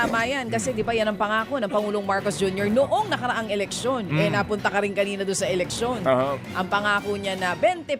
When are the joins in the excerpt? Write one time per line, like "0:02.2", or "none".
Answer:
none